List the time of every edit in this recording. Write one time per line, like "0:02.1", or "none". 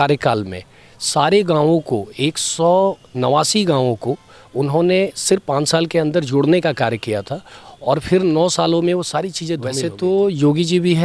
0:09.6